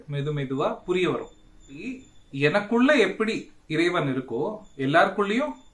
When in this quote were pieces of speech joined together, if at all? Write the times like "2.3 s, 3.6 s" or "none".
none

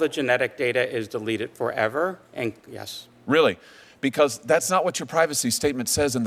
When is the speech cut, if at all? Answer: none

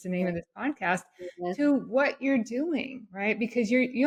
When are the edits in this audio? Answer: none

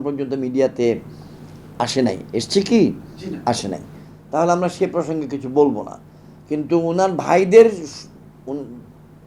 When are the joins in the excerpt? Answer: none

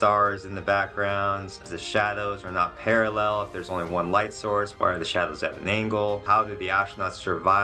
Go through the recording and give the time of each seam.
1.6 s, 4.7 s, 6.2 s

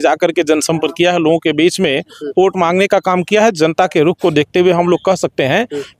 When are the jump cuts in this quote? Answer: none

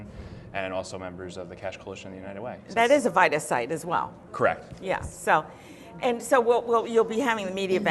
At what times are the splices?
2.4 s

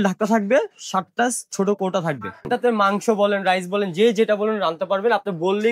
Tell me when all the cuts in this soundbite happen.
2.4 s

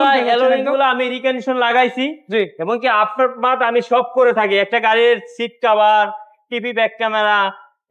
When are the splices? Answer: none

